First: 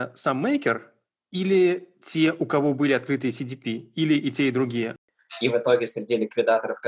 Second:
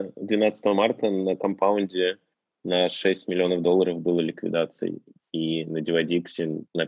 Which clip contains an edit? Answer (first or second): first